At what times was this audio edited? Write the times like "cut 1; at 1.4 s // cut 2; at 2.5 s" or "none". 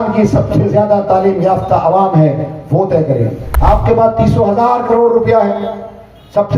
cut 1; at 3.4 s